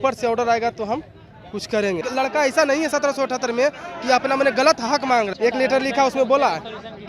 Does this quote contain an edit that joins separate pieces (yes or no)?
yes